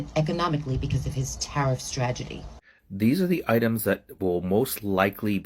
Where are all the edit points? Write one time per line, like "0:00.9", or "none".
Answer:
0:02.5